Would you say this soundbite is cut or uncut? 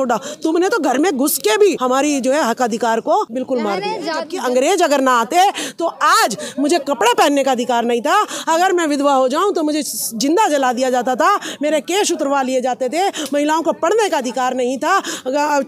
cut